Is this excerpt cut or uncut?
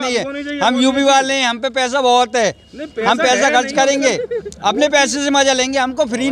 uncut